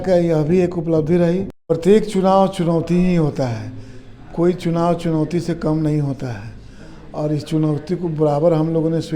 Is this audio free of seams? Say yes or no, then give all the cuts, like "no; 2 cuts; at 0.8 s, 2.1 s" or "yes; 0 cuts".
no; 1 cut; at 1.7 s